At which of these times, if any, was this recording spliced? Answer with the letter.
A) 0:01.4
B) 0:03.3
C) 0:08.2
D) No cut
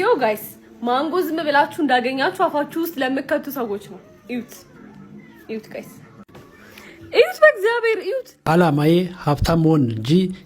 C